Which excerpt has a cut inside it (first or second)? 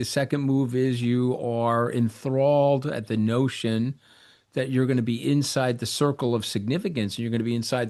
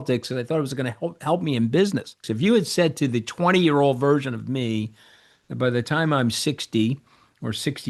second